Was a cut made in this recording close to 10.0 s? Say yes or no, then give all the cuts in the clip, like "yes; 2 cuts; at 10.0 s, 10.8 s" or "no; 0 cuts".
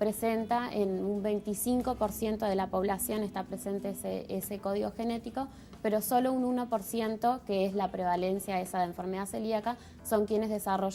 no; 0 cuts